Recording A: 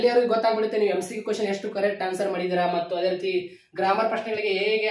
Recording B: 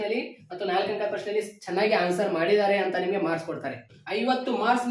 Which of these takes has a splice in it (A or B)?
B